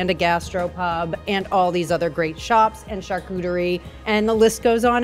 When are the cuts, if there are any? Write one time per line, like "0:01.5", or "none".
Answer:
0:03.9